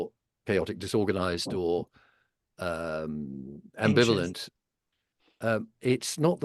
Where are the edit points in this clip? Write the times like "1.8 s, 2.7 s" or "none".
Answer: none